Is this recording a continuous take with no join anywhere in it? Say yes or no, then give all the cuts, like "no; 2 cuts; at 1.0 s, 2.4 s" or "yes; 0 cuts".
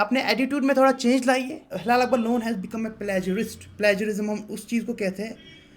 no; 1 cut; at 1.7 s